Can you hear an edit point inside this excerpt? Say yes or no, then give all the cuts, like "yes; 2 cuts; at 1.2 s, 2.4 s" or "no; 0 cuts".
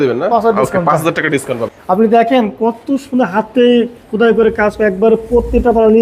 yes; 1 cut; at 1.7 s